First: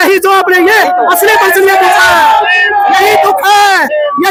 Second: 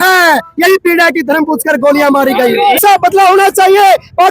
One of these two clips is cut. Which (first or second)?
second